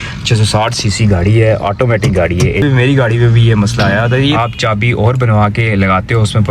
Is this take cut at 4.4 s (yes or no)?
yes